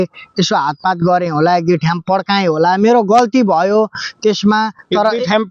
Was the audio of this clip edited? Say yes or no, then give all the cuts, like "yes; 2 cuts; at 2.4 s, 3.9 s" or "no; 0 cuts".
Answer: no; 0 cuts